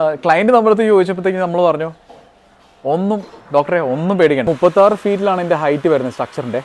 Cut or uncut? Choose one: cut